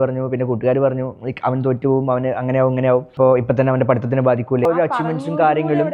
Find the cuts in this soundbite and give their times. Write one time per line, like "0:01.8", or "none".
0:03.1
0:04.7